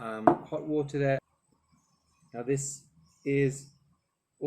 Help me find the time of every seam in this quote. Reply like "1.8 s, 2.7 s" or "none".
1.3 s